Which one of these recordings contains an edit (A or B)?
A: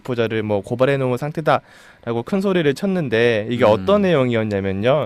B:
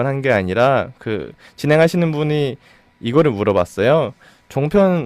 B